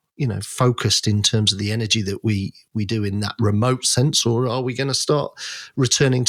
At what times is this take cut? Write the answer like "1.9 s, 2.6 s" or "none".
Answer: none